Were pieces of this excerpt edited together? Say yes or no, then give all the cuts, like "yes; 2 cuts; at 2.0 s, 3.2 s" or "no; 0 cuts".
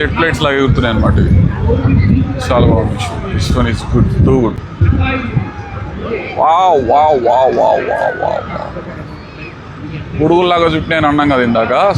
yes; 1 cut; at 4.6 s